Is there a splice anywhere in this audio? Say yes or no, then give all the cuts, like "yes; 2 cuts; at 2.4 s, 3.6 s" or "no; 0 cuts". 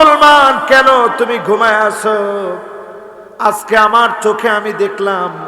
no; 0 cuts